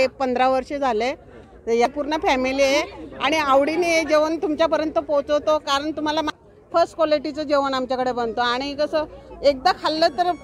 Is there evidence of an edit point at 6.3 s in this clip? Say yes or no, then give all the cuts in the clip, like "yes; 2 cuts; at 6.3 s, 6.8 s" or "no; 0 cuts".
yes; 2 cuts; at 1.9 s, 6.3 s